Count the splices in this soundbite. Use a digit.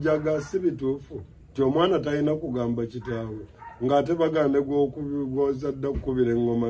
0